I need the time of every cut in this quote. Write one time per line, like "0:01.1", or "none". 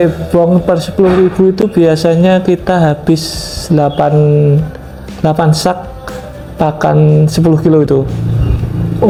none